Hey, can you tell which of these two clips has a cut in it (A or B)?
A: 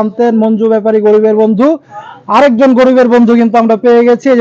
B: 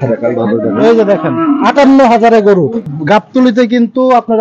B